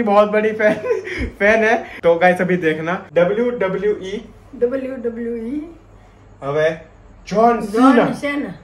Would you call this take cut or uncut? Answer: cut